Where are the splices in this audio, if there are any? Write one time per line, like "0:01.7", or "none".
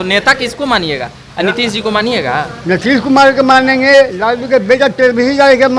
none